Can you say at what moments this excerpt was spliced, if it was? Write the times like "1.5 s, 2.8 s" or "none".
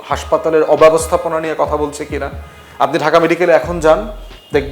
none

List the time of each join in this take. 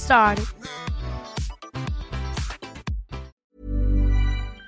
3.3 s

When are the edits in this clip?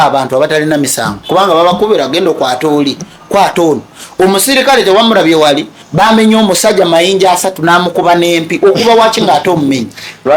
none

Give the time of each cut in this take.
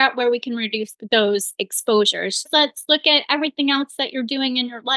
0.9 s, 2.5 s

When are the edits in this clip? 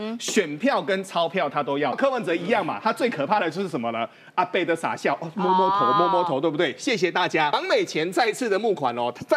2.0 s, 7.5 s

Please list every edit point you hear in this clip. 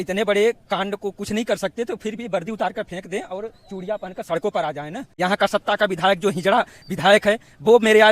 5.0 s

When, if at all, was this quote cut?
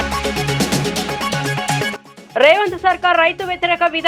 none

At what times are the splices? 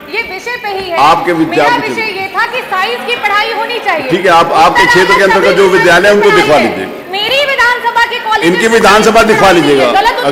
none

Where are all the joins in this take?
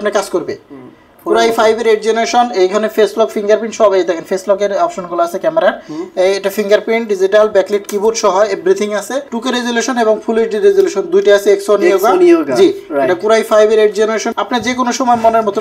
9.2 s, 14.3 s

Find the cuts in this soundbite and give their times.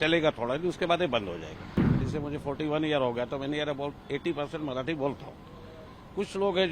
2.0 s

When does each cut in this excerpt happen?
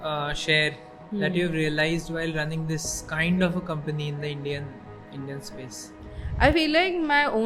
none

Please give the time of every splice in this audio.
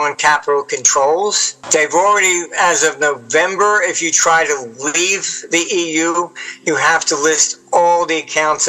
1.5 s

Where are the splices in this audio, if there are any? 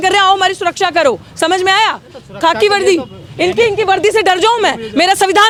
none

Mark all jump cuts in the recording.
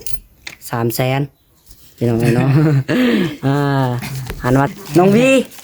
4.7 s

